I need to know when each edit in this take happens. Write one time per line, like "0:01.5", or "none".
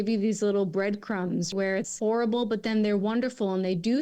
0:01.9